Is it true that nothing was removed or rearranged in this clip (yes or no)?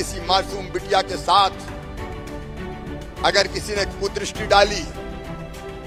yes